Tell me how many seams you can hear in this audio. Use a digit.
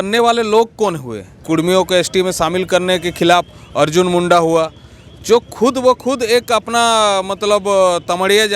1